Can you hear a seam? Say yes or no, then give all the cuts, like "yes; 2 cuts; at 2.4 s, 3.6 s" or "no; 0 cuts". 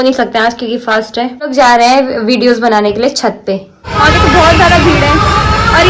yes; 2 cuts; at 1.5 s, 3.9 s